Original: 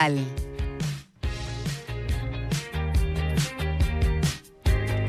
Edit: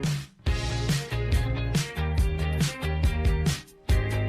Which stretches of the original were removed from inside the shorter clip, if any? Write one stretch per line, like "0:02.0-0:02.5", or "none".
none